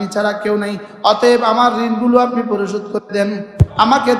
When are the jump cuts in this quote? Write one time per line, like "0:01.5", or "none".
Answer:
none